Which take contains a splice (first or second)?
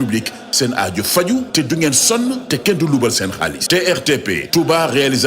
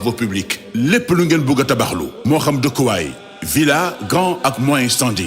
first